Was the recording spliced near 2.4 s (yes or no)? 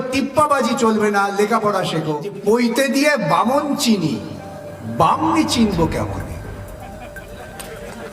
yes